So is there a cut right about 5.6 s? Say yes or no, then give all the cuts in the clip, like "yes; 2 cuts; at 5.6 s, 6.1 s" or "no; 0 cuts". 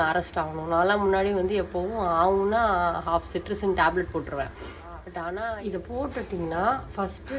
yes; 1 cut; at 5.6 s